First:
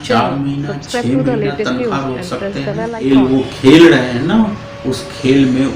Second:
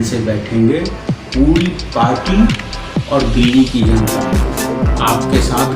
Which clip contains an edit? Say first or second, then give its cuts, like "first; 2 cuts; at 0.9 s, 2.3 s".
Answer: first; 1 cut; at 3.1 s